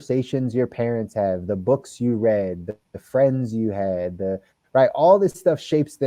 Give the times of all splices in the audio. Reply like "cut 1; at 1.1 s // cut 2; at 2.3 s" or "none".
none